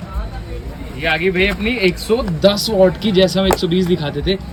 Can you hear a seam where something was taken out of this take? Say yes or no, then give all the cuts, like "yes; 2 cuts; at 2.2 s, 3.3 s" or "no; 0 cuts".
no; 0 cuts